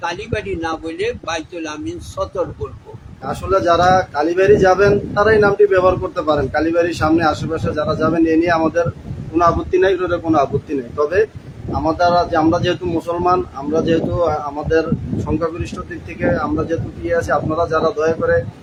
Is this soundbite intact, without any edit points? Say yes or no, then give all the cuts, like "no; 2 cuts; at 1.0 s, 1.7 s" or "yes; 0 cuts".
yes; 0 cuts